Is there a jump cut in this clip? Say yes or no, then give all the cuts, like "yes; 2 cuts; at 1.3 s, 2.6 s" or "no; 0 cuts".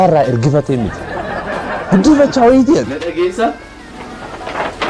yes; 1 cut; at 3.0 s